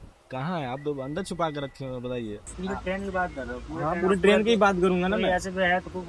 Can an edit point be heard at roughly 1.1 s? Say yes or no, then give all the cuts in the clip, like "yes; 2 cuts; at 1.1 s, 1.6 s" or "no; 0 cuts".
no; 1 cut; at 2.5 s